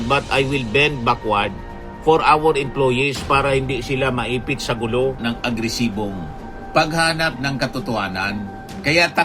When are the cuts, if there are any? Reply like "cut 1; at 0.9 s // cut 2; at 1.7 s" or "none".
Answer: cut 1; at 5.2 s